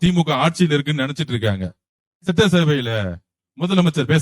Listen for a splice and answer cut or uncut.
uncut